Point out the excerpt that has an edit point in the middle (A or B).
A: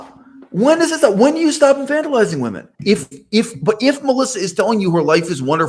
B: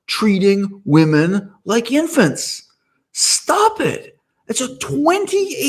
A